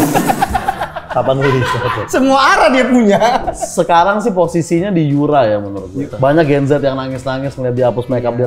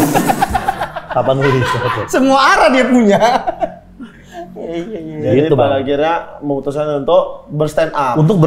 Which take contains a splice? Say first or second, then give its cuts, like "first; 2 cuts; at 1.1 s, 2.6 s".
first; 2 cuts; at 3.6 s, 6.0 s